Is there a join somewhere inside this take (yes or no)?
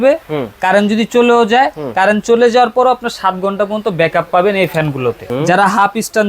yes